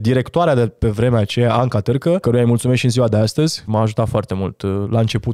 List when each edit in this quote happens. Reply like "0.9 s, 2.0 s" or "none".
2.2 s, 3.6 s